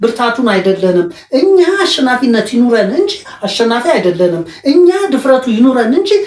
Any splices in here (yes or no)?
no